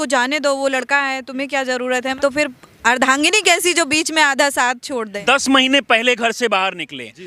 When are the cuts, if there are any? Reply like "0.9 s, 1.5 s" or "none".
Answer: 2.1 s, 5.1 s

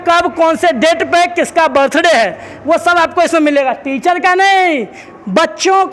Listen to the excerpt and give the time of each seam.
none

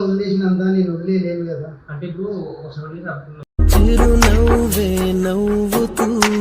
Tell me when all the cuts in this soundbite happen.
3.3 s

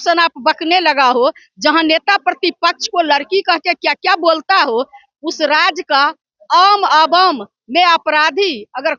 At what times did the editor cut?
none

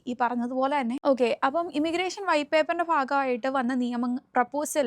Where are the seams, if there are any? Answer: 1.0 s

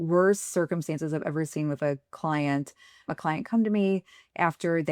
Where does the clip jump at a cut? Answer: 3.1 s

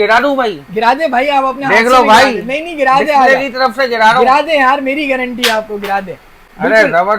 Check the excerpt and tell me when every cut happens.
none

